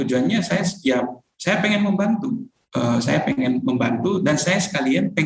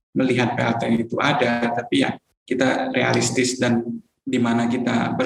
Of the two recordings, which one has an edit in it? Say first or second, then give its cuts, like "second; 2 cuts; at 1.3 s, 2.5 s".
second; 2 cuts; at 2.2 s, 4.1 s